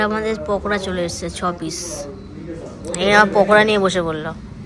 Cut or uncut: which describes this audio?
uncut